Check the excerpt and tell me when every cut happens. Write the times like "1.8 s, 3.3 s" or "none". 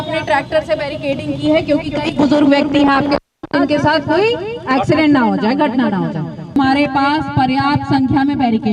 6.5 s